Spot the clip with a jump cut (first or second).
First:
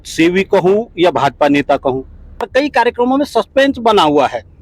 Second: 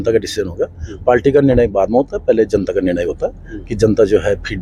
first